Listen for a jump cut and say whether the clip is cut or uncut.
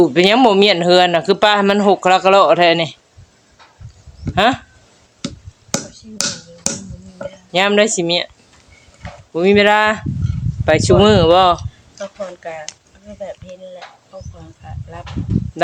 uncut